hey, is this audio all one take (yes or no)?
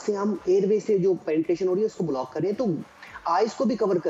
yes